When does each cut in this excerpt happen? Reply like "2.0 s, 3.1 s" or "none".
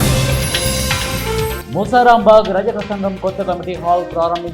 1.5 s